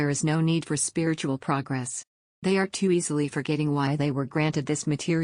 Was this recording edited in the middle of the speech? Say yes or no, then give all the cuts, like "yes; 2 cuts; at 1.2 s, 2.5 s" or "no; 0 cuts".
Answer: no; 0 cuts